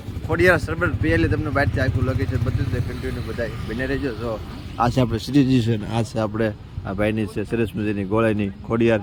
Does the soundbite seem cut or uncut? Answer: uncut